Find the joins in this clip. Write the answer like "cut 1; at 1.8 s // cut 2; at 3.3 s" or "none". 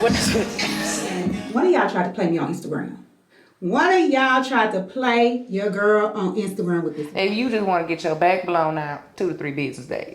cut 1; at 1.3 s // cut 2; at 7.0 s